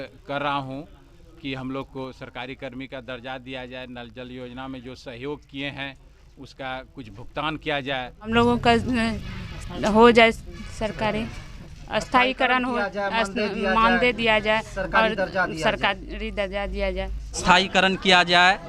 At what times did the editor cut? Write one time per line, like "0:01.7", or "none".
0:08.3
0:17.4